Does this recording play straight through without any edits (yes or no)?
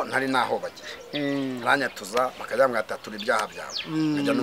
yes